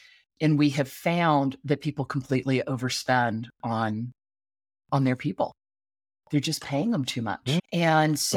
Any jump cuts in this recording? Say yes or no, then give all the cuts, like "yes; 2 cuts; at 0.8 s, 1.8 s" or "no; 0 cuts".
no; 0 cuts